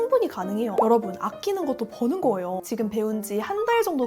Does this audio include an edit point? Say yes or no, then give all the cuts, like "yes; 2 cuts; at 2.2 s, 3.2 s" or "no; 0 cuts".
yes; 1 cut; at 2.6 s